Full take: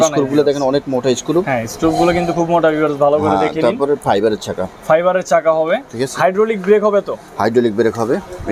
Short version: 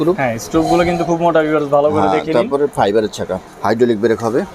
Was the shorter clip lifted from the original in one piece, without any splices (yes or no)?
no